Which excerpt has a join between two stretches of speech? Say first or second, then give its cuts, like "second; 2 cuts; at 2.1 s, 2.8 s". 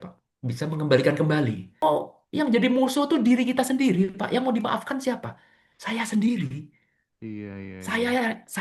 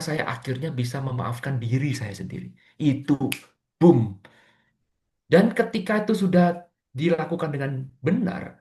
first; 1 cut; at 1.8 s